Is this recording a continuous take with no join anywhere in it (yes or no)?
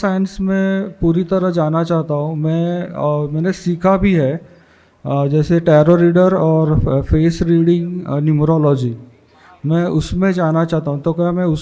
yes